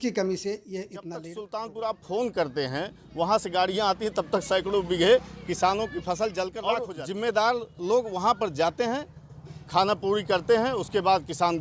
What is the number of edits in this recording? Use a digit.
2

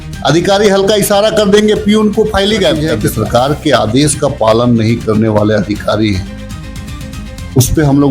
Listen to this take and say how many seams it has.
1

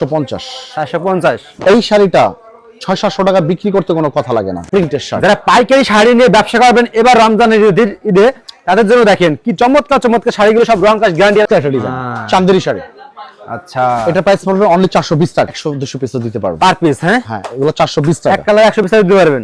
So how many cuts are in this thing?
3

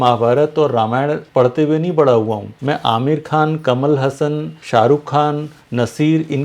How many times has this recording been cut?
3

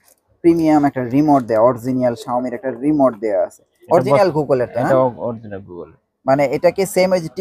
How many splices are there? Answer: 1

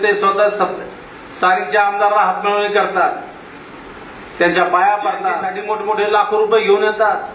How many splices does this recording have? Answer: 1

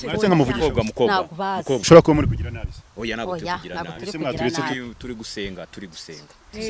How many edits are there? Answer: 1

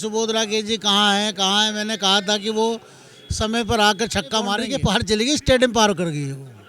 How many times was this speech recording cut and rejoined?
1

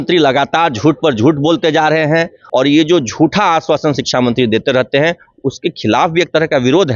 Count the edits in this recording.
1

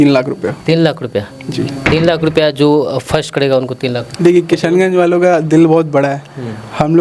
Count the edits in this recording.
1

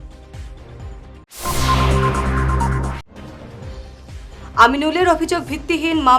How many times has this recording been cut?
1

